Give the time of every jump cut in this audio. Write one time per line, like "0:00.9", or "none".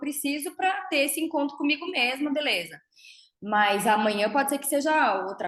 none